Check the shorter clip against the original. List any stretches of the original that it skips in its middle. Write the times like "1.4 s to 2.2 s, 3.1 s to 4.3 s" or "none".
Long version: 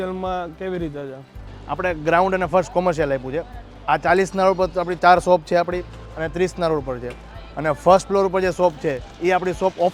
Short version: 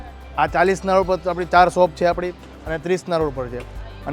none